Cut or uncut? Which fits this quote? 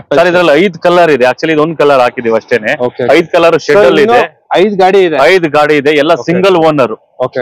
uncut